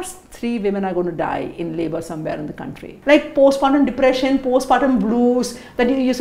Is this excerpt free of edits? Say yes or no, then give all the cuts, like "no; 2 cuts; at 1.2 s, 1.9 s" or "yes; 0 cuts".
no; 1 cut; at 2.9 s